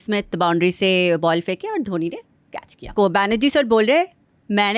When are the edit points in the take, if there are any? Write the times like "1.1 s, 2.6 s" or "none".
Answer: 2.9 s